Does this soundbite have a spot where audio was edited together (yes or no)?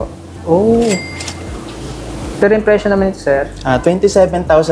no